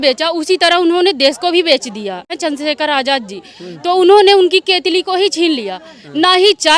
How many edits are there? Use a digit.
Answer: 1